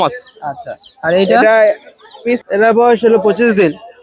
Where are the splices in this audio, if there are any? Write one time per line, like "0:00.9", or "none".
0:02.4